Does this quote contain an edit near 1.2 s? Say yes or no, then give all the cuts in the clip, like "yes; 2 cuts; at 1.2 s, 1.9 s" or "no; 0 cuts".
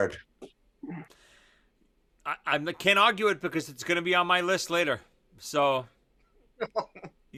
no; 0 cuts